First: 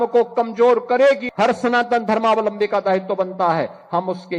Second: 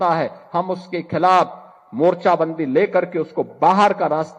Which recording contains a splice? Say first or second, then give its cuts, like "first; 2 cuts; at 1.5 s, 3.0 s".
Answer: first; 1 cut; at 1.2 s